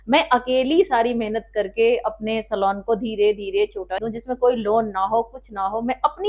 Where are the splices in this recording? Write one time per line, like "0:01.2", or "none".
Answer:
0:04.0